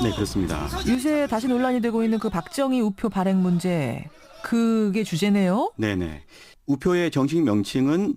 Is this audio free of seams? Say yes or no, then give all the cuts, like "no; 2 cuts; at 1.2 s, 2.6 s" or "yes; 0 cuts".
yes; 0 cuts